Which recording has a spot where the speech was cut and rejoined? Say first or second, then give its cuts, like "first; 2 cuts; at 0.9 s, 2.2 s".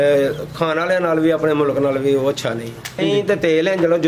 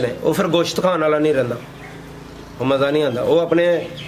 first; 1 cut; at 3.0 s